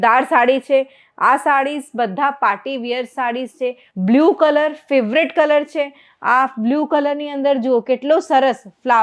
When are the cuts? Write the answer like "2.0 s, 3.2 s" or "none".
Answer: 3.9 s